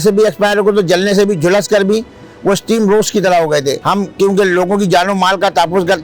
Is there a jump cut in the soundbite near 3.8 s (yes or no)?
yes